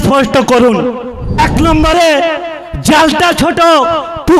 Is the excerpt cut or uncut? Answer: cut